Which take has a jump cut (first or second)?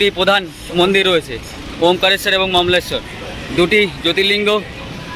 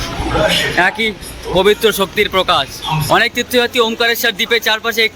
second